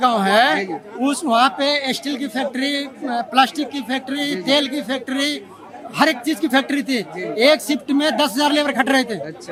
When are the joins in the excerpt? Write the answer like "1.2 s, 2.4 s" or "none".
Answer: none